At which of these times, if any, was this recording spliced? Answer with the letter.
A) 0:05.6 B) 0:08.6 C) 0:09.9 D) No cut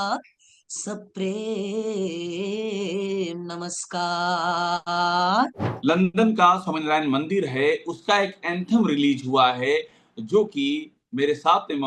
A